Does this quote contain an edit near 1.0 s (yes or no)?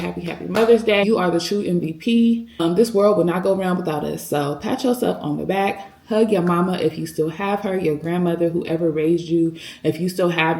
yes